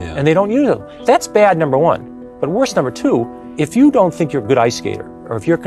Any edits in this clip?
yes; 2 cuts; at 0.9 s, 3.4 s

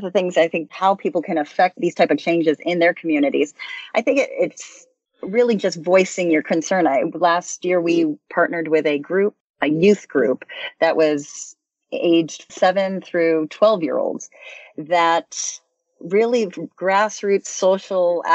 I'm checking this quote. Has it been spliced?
yes; 2 cuts; at 0.7 s, 1.8 s

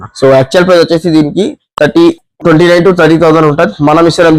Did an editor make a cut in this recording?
no; 0 cuts

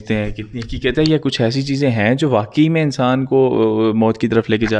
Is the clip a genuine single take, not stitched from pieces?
yes; 0 cuts

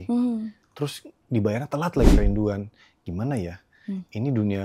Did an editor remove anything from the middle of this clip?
yes; 1 cut; at 2.2 s

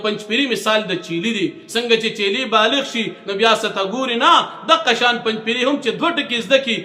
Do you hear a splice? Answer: no; 0 cuts

